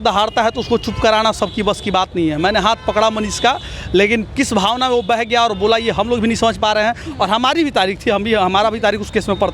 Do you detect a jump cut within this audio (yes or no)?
no